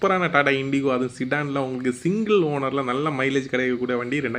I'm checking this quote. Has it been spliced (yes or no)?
no